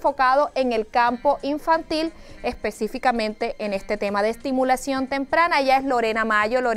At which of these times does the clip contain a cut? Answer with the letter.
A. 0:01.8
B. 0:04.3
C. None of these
A